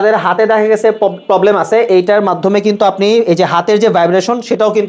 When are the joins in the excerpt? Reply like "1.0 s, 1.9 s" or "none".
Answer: none